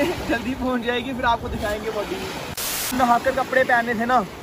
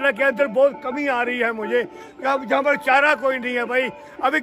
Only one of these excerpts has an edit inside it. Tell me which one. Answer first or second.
first